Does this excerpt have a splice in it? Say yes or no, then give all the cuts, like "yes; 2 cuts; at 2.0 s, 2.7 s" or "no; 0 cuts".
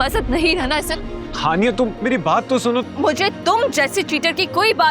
yes; 1 cut; at 2.8 s